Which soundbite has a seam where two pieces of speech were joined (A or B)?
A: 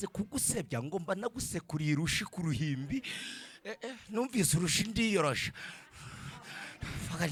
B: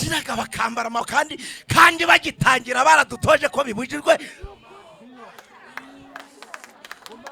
B